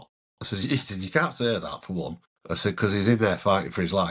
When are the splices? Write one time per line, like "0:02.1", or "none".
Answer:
0:02.3